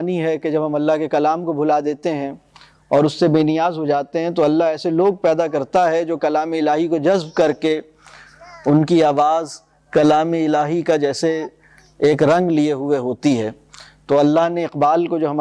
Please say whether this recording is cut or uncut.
uncut